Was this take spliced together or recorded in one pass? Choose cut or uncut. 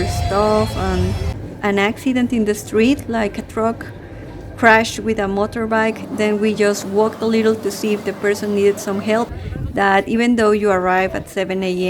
cut